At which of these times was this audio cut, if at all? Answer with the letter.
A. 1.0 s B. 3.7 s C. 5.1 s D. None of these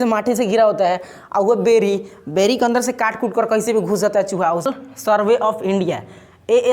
C